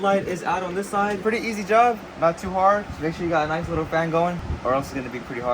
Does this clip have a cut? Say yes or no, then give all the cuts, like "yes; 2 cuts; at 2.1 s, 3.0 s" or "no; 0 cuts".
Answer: yes; 2 cuts; at 1.2 s, 4.5 s